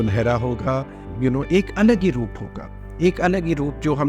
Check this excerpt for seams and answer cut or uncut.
cut